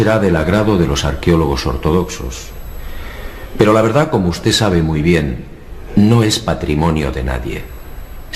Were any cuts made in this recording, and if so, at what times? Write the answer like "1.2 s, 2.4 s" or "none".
6.0 s